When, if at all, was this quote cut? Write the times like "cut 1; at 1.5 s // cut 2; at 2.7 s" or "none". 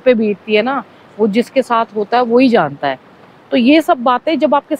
none